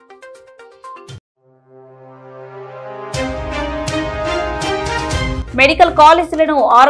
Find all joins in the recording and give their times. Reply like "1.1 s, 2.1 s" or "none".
5.4 s